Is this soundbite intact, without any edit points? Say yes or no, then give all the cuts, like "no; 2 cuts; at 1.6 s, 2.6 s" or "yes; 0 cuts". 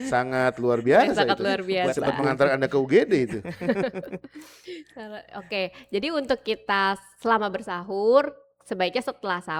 yes; 0 cuts